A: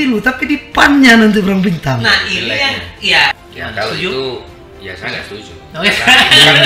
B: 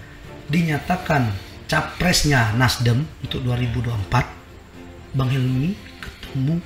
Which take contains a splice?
A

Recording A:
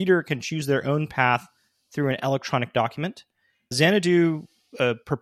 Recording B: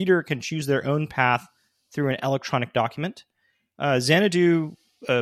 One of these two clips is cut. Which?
A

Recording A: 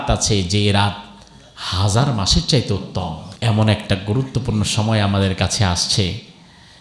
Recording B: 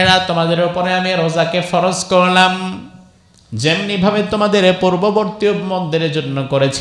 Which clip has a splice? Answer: A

